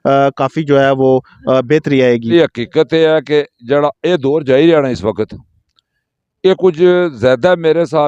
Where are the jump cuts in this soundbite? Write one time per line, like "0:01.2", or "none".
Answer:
0:02.3